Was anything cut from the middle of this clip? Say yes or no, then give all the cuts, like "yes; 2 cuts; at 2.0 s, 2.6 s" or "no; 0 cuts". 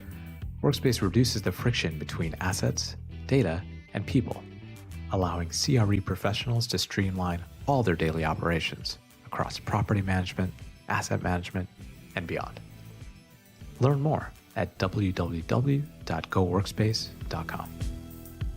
yes; 1 cut; at 17.7 s